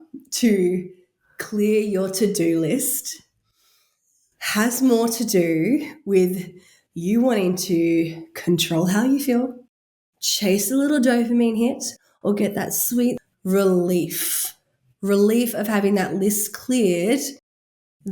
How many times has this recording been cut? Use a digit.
1